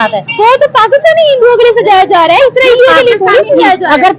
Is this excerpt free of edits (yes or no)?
yes